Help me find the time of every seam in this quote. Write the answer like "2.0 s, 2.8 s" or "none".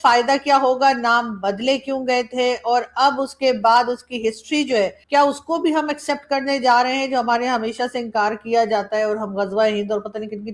none